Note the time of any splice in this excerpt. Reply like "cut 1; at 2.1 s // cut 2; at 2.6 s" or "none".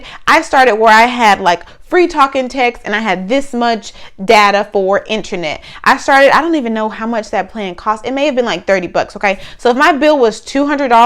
none